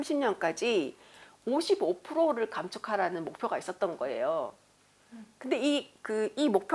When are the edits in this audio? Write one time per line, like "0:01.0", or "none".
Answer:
none